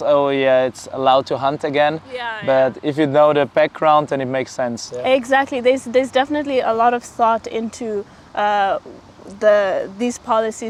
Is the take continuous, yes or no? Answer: yes